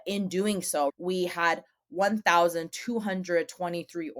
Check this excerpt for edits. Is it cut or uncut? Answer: cut